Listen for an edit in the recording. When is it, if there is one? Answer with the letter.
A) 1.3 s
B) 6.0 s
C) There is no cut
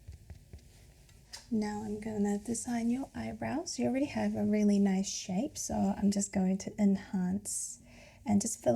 A